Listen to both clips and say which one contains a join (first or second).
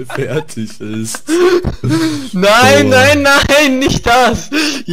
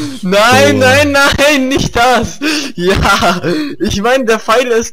first